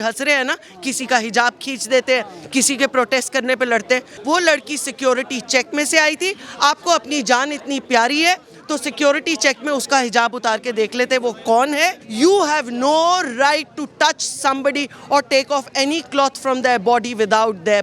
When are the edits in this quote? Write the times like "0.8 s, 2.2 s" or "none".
4.1 s, 12.0 s